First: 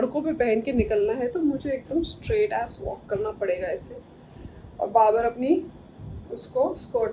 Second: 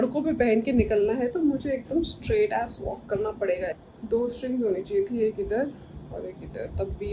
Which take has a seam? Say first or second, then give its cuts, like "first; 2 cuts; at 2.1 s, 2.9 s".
second; 1 cut; at 3.7 s